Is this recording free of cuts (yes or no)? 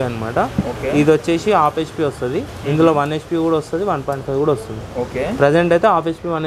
yes